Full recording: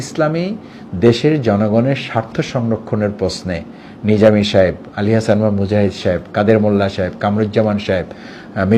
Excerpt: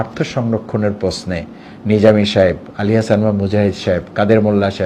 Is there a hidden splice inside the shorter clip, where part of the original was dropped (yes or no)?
no